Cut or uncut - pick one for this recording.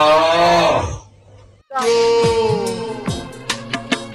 cut